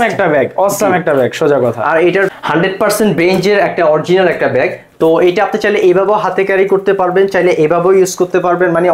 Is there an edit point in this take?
yes; 1 cut; at 2.4 s

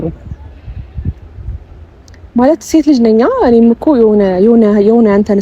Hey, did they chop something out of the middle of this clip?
no; 0 cuts

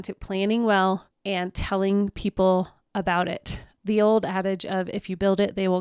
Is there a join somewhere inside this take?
yes; 1 cut; at 1.1 s

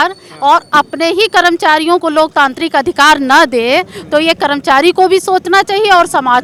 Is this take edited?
no; 0 cuts

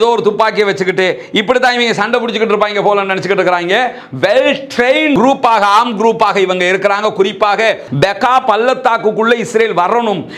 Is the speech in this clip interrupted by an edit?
yes; 1 cut; at 7.8 s

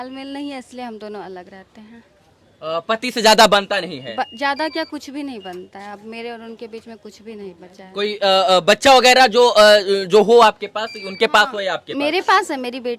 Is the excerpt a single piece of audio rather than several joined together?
yes; 0 cuts

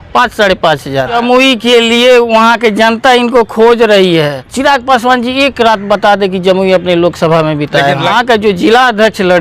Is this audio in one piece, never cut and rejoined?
no; 3 cuts; at 1.2 s, 4.4 s, 8.1 s

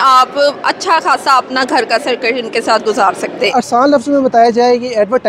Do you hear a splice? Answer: yes; 1 cut; at 3.5 s

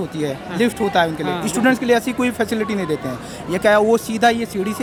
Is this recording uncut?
yes; 0 cuts

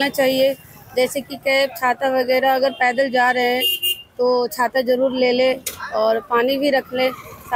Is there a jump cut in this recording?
no; 0 cuts

